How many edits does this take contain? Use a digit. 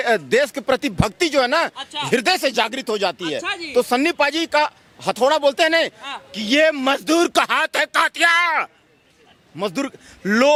0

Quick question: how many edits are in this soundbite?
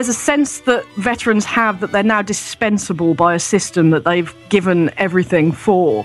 2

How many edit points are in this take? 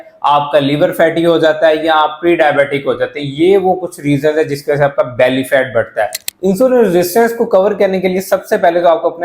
1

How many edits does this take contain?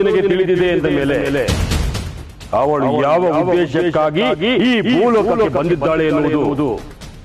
0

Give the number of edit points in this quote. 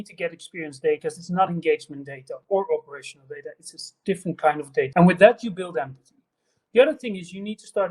2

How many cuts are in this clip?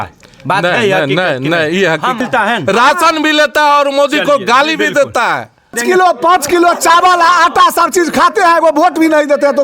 2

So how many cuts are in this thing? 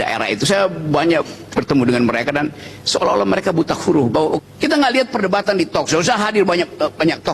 1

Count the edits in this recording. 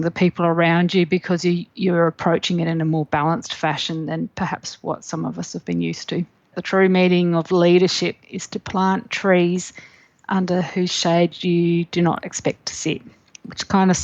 1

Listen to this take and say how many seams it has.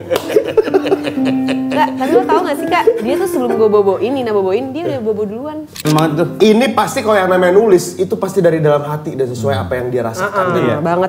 1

